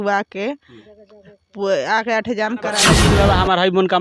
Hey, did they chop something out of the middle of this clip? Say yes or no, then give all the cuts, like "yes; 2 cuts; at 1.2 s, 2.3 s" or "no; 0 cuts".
yes; 1 cut; at 3.0 s